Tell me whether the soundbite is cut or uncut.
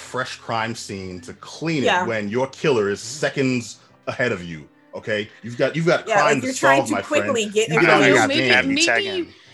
uncut